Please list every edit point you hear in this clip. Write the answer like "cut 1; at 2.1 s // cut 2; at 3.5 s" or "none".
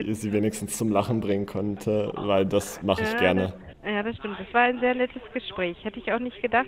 cut 1; at 3.7 s